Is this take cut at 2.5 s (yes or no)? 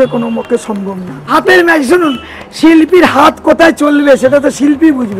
no